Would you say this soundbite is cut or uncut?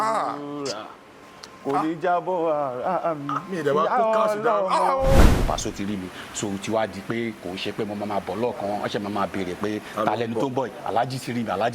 cut